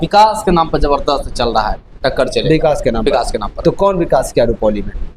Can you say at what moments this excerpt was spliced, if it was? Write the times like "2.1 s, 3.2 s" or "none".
none